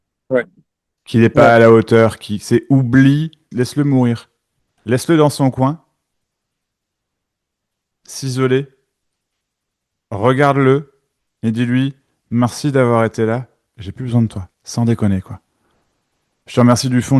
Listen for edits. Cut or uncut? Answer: cut